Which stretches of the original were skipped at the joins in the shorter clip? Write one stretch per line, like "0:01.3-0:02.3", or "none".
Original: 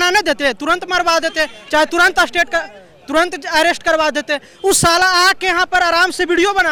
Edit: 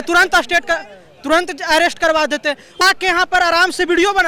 0:04.6-0:05.2